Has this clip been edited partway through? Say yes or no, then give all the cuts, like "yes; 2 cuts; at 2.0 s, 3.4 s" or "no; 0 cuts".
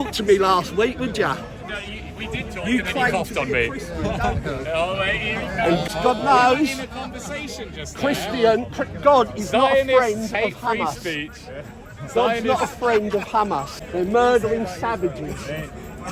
no; 0 cuts